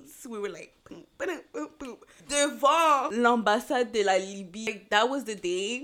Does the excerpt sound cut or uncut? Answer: cut